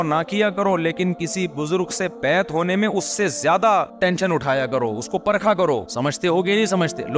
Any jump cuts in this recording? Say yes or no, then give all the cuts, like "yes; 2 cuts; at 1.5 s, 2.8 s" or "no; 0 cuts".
no; 0 cuts